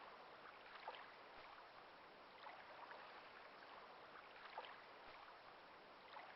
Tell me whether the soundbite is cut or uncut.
cut